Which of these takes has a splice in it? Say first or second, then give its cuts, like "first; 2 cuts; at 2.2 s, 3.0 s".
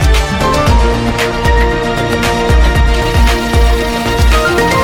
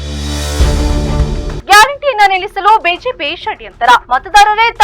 second; 1 cut; at 1.6 s